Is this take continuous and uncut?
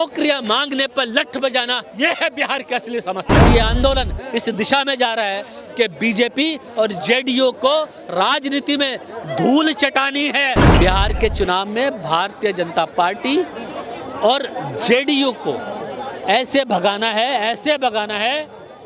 no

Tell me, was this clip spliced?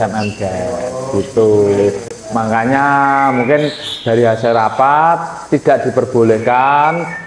no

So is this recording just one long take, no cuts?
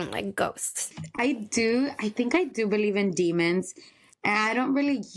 no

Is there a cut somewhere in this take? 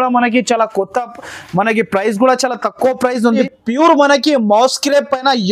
yes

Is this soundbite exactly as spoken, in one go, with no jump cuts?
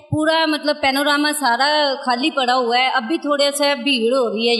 yes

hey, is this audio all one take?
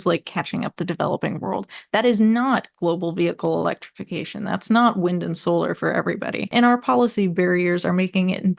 no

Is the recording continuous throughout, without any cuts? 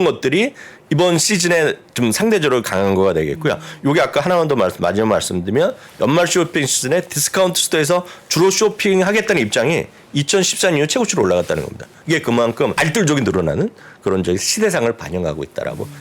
no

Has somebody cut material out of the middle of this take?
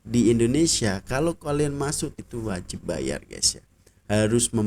yes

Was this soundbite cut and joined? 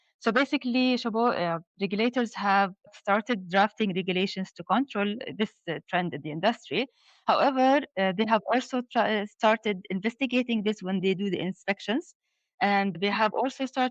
yes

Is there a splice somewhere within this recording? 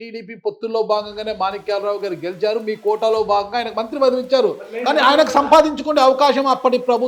no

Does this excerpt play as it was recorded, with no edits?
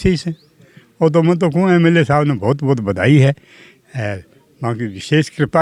yes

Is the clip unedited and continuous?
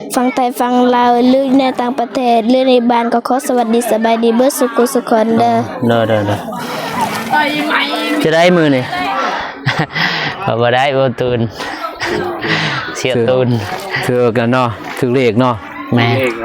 no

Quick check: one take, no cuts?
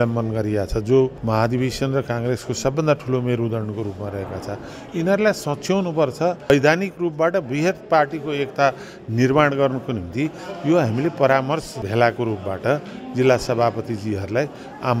no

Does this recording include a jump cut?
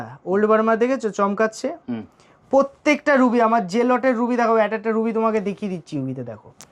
no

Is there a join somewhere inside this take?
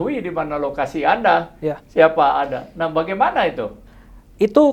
no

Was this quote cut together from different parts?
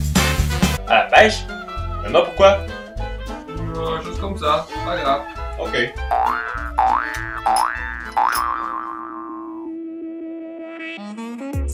no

